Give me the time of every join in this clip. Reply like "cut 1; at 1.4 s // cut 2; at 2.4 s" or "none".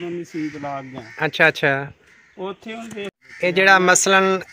cut 1; at 3.2 s